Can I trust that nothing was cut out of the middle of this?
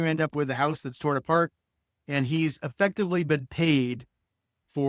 yes; 0 cuts

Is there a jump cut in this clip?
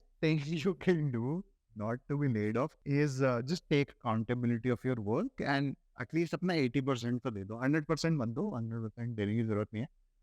yes; 1 cut; at 2.8 s

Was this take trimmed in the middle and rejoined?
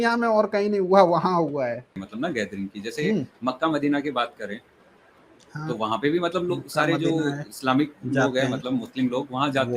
yes; 1 cut; at 2.0 s

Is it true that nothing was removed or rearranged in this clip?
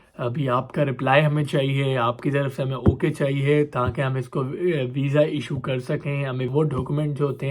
no; 1 cut; at 6.5 s

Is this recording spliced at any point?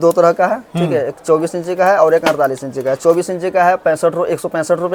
no; 0 cuts

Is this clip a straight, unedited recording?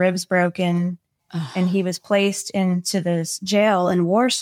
yes; 0 cuts

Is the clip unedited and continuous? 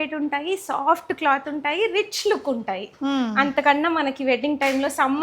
yes; 0 cuts

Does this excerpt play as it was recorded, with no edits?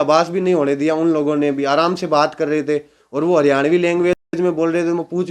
yes; 0 cuts

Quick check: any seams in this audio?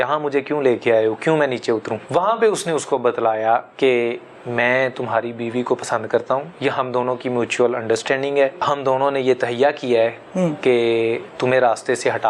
yes; 4 cuts; at 2.0 s, 3.7 s, 6.5 s, 8.6 s

